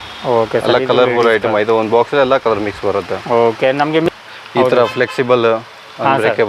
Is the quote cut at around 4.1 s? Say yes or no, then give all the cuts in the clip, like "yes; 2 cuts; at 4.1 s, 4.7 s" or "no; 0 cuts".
yes; 1 cut; at 4.1 s